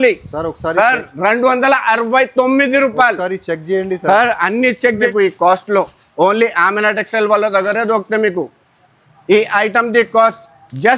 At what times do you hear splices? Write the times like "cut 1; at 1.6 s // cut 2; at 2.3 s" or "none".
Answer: cut 1; at 5.1 s